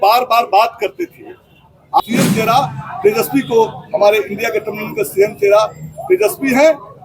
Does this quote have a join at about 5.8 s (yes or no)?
no